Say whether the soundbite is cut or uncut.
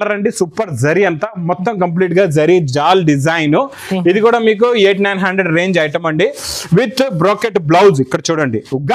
uncut